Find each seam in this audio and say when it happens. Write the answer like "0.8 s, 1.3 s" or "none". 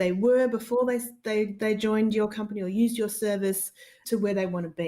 3.9 s